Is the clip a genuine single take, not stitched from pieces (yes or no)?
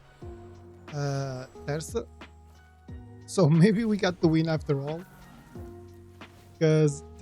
no